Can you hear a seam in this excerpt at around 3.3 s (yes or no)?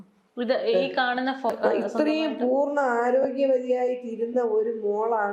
no